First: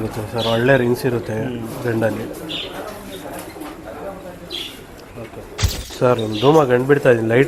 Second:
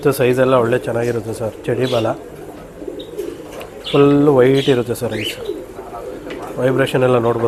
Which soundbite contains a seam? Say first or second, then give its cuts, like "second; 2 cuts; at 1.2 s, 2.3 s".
first; 1 cut; at 5.9 s